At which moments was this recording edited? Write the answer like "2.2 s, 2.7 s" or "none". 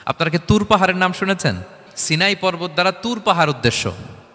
1.9 s